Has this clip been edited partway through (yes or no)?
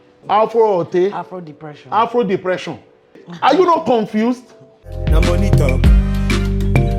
yes